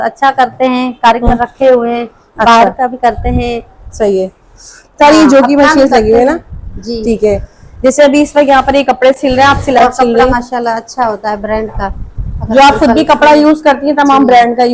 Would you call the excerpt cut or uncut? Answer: cut